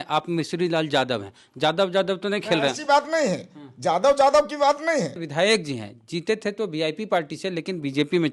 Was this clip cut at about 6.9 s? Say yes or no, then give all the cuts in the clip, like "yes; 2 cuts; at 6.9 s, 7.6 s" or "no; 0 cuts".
no; 1 cut; at 5.2 s